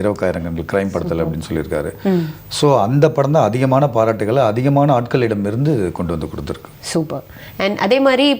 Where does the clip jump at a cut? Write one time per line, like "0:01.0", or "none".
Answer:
none